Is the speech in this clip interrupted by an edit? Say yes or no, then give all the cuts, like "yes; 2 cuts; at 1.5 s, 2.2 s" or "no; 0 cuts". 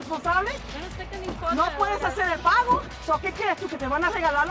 no; 0 cuts